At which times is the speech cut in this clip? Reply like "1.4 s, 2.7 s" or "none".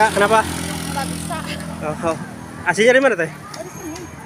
none